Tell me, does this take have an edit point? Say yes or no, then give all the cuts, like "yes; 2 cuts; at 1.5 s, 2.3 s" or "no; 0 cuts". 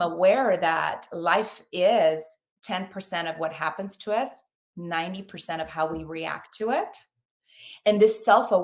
no; 0 cuts